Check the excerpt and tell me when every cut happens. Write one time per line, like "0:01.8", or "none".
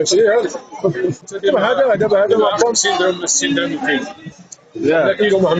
0:01.2